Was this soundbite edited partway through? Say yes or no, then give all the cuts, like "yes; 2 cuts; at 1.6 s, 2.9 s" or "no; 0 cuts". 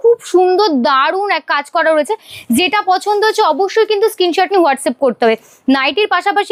no; 0 cuts